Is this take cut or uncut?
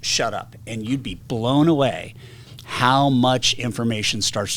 uncut